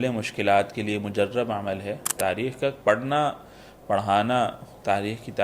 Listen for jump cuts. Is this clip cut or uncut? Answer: cut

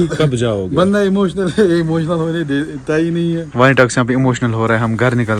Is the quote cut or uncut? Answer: uncut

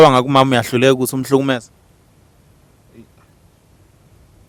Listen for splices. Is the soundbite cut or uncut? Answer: uncut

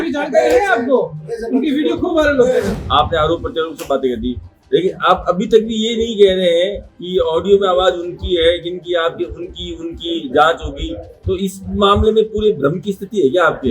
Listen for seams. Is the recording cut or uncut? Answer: cut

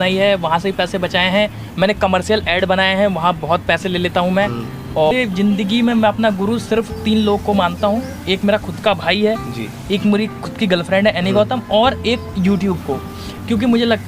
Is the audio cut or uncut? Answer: cut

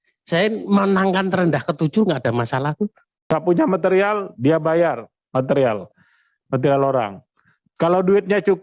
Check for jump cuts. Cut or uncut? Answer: cut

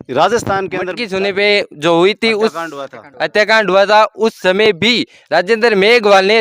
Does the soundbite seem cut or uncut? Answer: cut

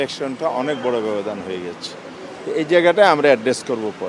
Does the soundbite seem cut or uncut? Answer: uncut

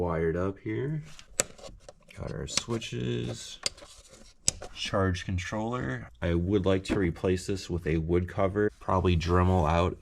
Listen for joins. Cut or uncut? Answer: cut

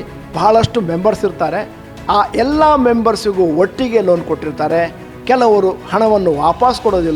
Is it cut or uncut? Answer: uncut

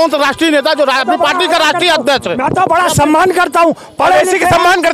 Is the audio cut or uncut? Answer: uncut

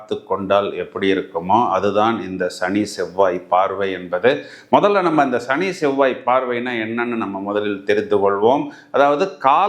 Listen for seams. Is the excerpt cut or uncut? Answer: uncut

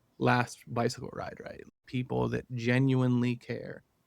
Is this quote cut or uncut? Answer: cut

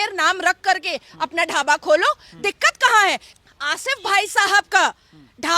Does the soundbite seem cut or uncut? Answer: cut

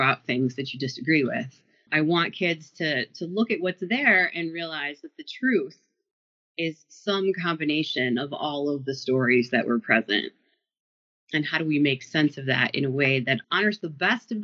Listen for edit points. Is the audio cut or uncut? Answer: cut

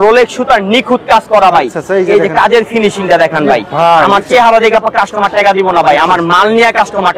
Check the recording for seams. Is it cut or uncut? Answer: uncut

